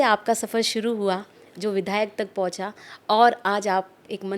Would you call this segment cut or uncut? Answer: uncut